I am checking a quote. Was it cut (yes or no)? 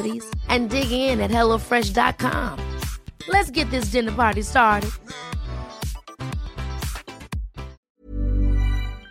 yes